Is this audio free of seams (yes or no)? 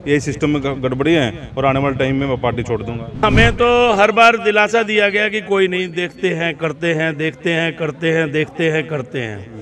no